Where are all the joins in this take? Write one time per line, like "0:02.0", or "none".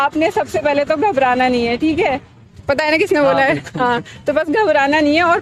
none